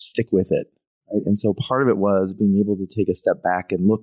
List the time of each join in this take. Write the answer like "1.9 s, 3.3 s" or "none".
none

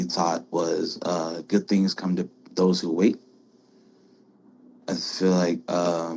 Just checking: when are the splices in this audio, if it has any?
none

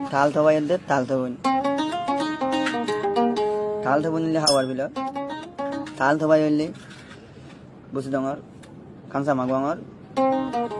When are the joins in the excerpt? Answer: 1.0 s

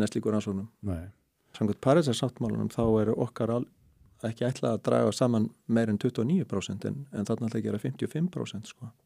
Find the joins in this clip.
1.5 s

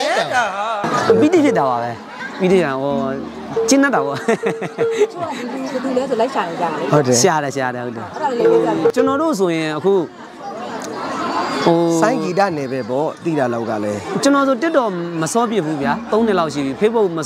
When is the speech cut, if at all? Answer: none

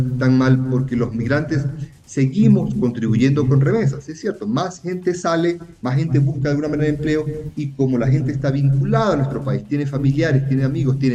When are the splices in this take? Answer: none

